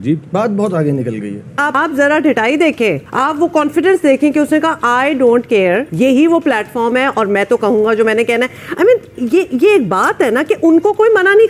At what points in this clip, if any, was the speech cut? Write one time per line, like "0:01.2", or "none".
0:01.6
0:03.1
0:05.9